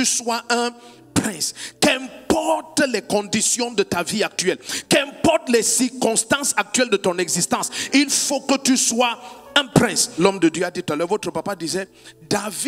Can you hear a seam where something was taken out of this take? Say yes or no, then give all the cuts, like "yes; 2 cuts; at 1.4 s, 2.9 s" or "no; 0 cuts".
yes; 1 cut; at 10.2 s